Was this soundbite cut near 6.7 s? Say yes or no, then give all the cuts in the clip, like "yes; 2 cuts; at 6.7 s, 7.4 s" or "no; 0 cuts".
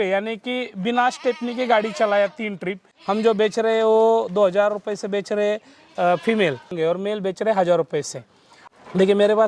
yes; 3 cuts; at 2.9 s, 6.7 s, 8.6 s